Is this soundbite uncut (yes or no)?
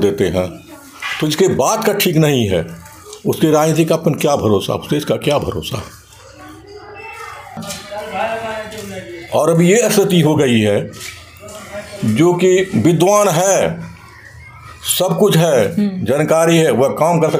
no